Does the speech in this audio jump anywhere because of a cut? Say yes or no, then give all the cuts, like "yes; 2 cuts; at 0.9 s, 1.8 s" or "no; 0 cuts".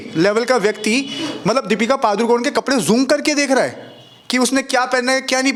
no; 0 cuts